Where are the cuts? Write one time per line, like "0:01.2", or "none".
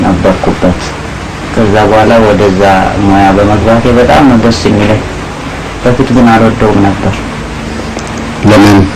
none